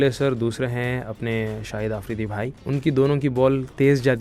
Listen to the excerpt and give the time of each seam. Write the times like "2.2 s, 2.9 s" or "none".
2.5 s